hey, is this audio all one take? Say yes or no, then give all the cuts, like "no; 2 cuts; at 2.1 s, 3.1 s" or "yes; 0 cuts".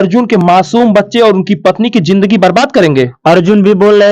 yes; 0 cuts